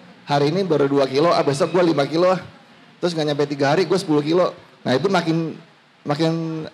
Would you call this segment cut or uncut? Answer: uncut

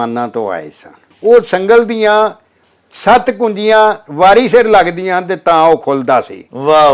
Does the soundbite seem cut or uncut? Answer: cut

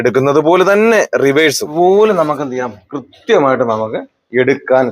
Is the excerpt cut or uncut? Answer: cut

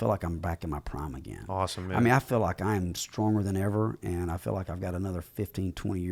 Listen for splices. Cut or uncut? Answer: uncut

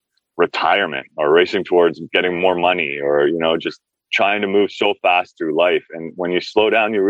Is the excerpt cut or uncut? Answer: uncut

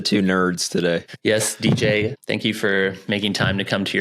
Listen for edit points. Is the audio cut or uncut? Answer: cut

